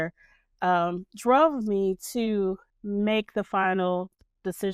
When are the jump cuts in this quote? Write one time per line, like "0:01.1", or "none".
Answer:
0:02.7